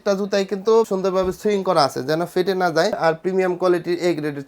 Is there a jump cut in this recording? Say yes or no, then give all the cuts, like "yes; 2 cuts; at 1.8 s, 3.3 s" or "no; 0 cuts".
yes; 2 cuts; at 0.9 s, 3.0 s